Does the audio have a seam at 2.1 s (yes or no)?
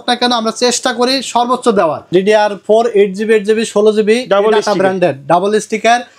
yes